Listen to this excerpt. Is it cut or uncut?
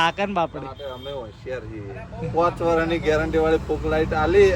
uncut